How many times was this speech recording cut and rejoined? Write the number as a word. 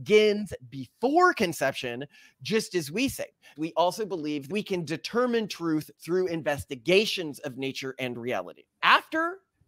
three